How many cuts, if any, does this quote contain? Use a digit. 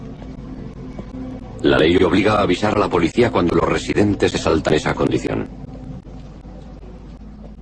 1